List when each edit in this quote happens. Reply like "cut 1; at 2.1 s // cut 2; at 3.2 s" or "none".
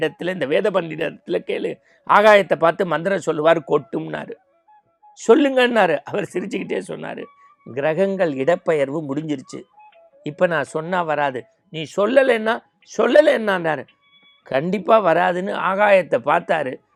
none